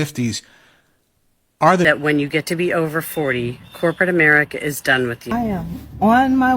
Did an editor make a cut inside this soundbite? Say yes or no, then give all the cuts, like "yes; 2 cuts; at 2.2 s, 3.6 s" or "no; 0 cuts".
yes; 2 cuts; at 1.8 s, 5.3 s